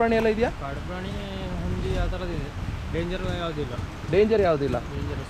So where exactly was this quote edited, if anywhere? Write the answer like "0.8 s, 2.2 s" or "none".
none